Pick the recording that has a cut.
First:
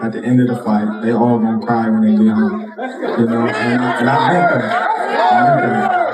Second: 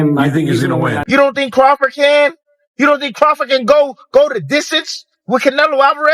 second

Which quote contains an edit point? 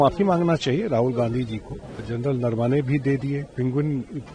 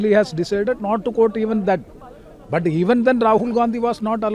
first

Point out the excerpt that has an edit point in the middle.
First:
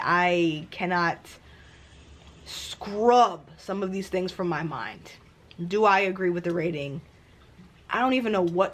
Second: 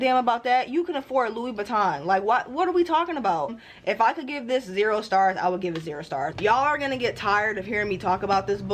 second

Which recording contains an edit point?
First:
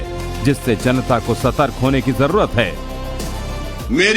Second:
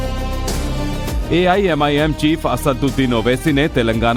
first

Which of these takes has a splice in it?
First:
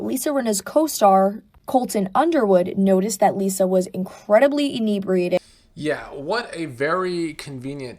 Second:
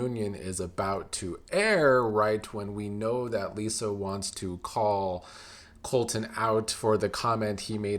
first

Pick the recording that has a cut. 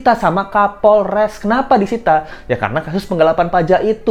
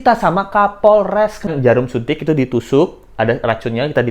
second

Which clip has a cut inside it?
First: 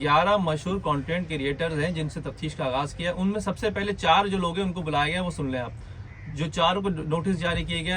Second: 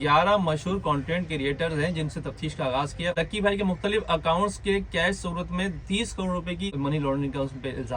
second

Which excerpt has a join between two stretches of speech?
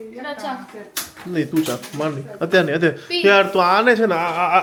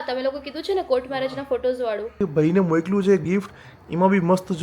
second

